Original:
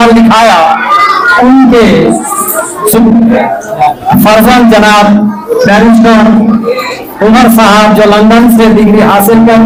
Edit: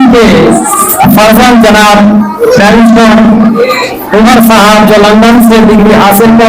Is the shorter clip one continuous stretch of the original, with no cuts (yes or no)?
no